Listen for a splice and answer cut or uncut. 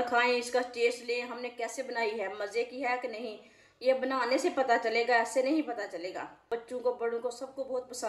cut